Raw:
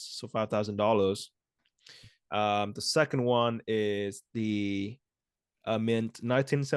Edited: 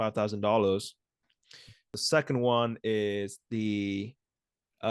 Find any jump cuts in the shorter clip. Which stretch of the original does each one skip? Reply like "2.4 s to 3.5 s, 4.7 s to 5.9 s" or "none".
2.3 s to 2.7 s

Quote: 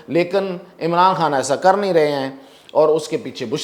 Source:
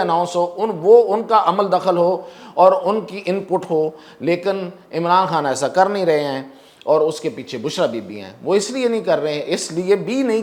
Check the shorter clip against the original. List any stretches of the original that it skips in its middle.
none

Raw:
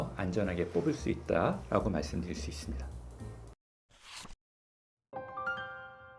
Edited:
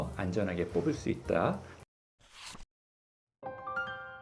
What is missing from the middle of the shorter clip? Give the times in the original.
1.6 s to 3.3 s

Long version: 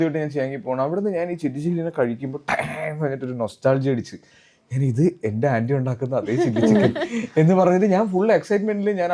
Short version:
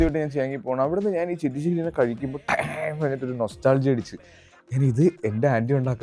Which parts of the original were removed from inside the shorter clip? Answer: none

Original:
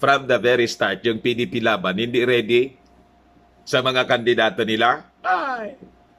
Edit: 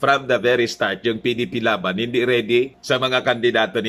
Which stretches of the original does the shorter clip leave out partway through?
2.8 s to 3.6 s

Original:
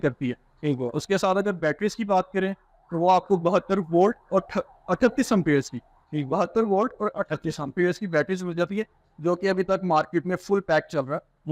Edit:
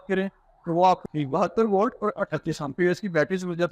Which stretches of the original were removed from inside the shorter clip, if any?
3.2 s to 6.0 s

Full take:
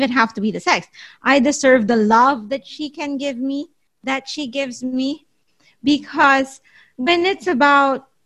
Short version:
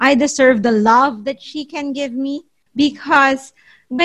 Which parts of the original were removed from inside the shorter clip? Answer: 3.8 s to 5.6 s

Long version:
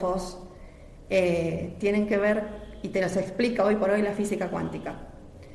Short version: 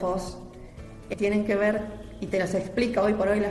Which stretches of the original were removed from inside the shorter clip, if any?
1.0 s to 1.7 s

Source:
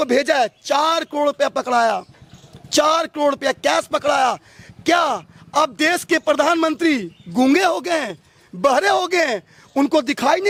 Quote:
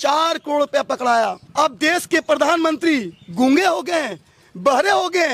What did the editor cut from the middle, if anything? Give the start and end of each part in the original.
2.1 s to 5.4 s

